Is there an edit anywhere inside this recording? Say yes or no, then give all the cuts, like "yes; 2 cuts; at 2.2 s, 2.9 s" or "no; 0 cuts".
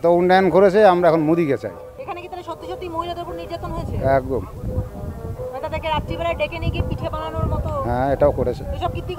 yes; 1 cut; at 1.9 s